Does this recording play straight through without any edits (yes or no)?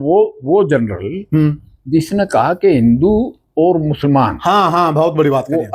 yes